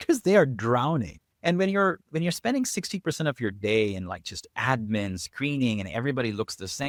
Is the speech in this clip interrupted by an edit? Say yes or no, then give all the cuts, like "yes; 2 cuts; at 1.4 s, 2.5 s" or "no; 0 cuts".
no; 0 cuts